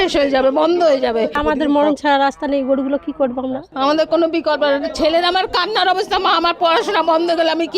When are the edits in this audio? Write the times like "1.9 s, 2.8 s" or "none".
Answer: 1.4 s, 3.7 s

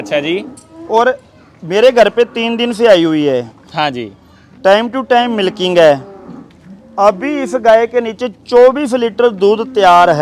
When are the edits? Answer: none

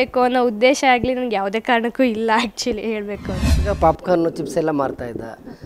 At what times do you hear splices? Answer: 3.5 s

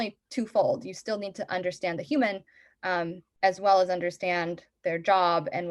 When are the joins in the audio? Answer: none

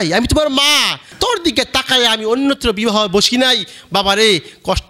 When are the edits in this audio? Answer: 1.1 s

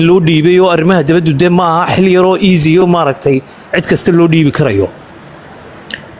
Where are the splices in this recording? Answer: none

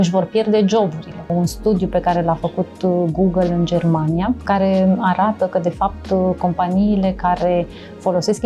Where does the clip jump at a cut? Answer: 1.3 s, 4.5 s

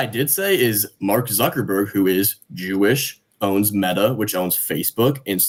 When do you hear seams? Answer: none

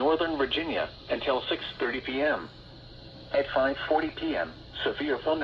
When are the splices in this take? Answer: 1.0 s, 4.2 s

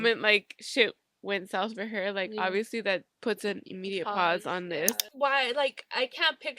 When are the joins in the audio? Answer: 5.1 s

